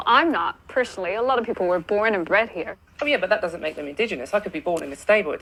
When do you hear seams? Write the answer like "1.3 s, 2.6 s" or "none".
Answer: none